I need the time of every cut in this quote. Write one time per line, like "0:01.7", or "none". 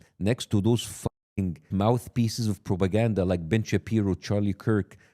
0:01.7